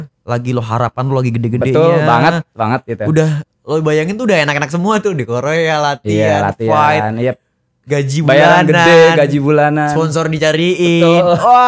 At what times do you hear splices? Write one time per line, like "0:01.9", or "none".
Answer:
none

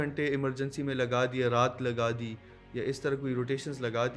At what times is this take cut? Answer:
none

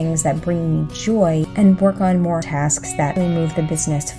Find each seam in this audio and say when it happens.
0:01.5
0:02.7

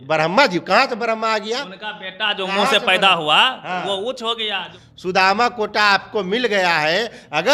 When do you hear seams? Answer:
0:04.7

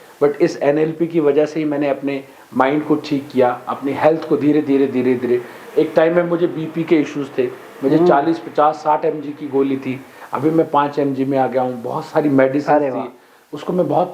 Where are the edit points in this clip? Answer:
none

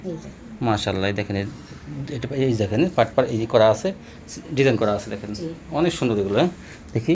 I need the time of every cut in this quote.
none

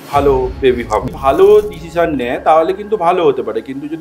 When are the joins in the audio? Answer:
0:01.0

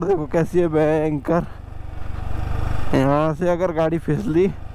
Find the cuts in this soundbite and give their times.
none

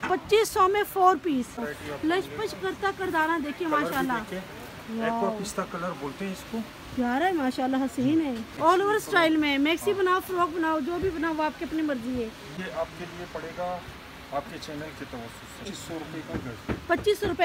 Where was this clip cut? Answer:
0:01.7
0:08.5
0:12.6
0:15.7

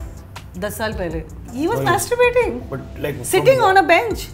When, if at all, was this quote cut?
none

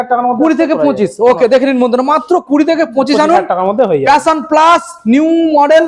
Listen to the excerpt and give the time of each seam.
none

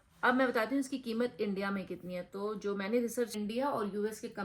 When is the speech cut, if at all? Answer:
0:03.3

